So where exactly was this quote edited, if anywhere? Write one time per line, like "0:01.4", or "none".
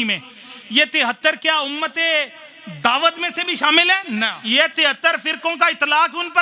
0:04.4